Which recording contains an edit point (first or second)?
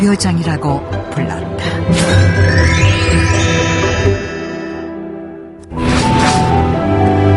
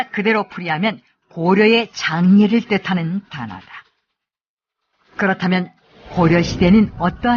second